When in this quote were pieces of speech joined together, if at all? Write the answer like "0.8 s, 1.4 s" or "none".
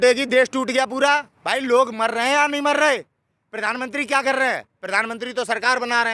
1.3 s